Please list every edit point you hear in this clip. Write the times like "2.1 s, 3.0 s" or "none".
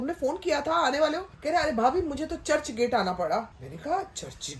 1.3 s, 3.6 s